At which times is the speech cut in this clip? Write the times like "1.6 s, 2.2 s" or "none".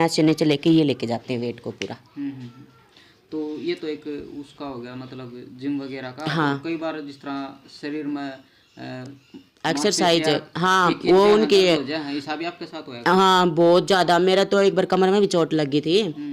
none